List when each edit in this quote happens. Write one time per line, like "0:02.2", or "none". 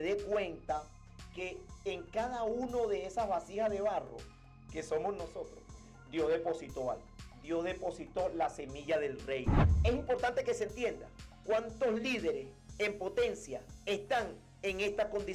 0:09.7

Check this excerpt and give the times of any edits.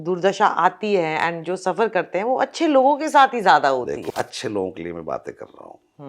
0:04.0

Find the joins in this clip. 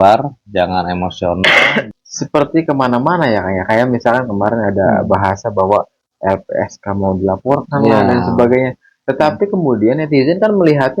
0:01.9

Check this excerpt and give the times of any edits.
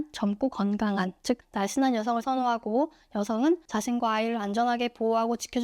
0:01.5
0:03.7

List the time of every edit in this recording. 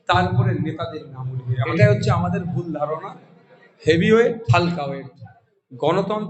0:01.6
0:04.4

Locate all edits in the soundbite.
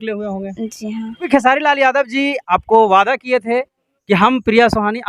0:01.3

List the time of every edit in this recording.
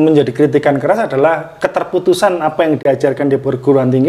0:02.8

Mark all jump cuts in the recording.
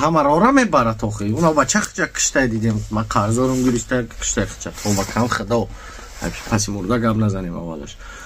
none

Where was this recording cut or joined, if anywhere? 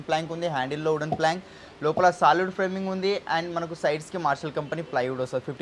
none

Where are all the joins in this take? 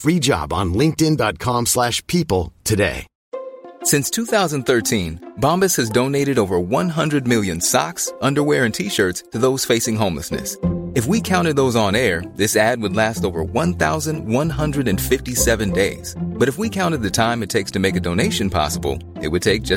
none

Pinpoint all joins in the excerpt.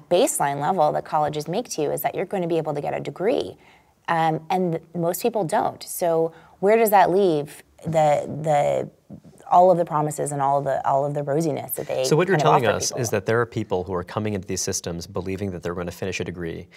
none

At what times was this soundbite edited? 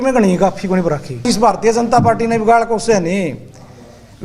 0:01.2

